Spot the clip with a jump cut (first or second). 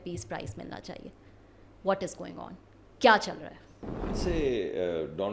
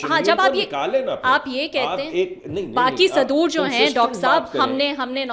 first